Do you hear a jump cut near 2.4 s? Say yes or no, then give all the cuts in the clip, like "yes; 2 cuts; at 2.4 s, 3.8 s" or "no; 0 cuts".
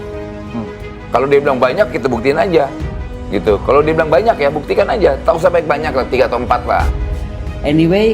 no; 1 cut; at 6.9 s